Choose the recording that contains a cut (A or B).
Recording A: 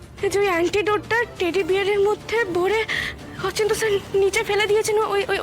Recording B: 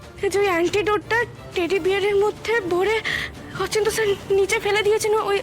A